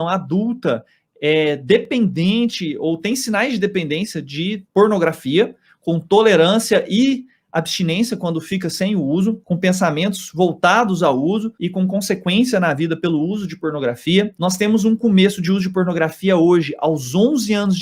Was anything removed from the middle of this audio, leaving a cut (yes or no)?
no